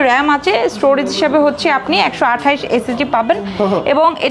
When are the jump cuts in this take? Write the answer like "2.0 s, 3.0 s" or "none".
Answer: none